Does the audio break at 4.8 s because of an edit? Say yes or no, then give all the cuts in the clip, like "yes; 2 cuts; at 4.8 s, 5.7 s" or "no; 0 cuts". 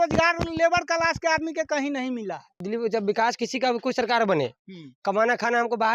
no; 1 cut; at 2.6 s